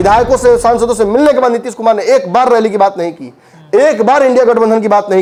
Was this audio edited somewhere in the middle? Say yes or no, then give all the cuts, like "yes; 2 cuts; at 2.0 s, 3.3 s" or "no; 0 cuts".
no; 0 cuts